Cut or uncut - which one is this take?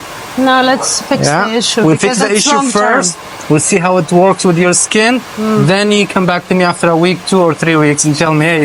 uncut